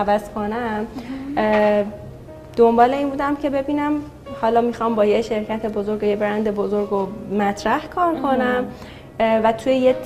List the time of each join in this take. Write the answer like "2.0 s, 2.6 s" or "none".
none